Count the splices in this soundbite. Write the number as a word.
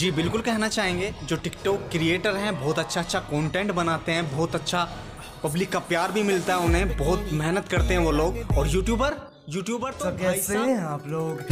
zero